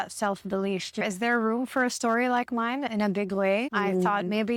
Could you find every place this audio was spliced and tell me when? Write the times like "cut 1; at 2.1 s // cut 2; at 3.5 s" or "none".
cut 1; at 1.0 s // cut 2; at 2.9 s // cut 3; at 3.7 s